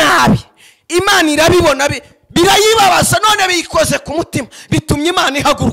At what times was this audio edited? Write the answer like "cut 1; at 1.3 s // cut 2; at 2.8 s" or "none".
none